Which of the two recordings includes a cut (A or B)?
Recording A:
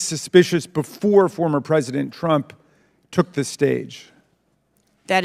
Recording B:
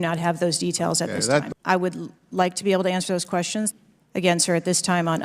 B